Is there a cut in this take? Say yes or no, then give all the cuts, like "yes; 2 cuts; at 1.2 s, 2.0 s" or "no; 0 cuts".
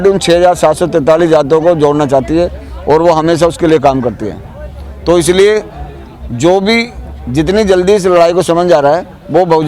no; 0 cuts